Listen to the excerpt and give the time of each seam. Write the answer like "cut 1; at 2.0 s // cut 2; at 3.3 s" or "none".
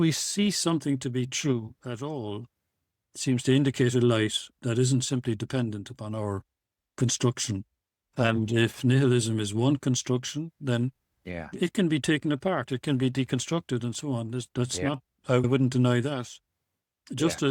cut 1; at 8.0 s // cut 2; at 15.4 s